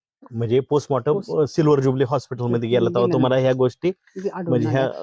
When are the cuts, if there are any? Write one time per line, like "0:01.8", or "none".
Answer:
none